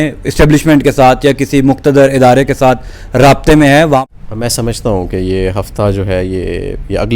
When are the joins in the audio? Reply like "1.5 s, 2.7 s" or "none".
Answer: 4.0 s